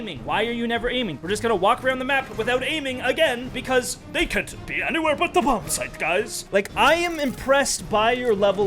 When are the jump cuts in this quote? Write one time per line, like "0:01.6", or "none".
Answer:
0:01.2
0:03.5
0:06.4

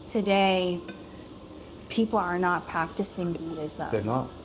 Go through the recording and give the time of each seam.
none

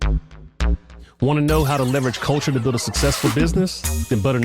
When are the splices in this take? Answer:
0:01.1

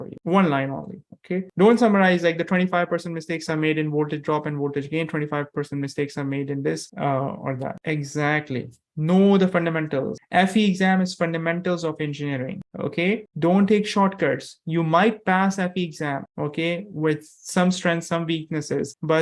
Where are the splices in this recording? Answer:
none

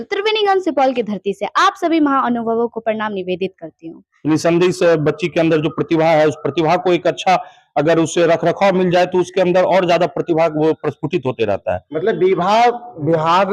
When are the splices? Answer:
0:04.1
0:11.9

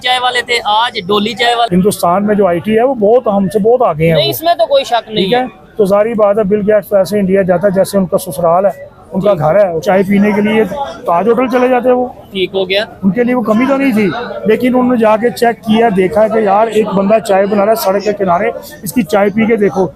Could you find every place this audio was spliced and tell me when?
0:01.7
0:09.8

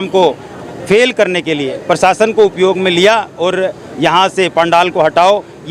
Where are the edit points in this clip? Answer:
none

